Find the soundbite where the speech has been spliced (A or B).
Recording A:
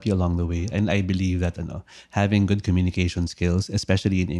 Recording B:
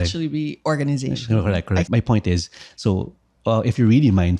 B